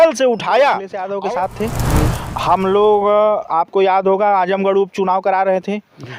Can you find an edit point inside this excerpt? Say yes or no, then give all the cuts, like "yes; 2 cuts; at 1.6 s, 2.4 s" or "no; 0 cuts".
yes; 1 cut; at 1.0 s